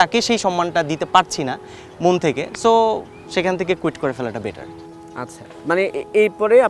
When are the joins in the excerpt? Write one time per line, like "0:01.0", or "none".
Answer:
none